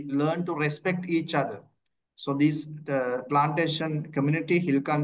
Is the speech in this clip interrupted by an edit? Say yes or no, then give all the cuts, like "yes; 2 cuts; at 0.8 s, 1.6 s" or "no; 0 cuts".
no; 0 cuts